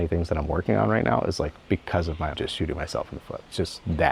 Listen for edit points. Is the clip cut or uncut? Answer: uncut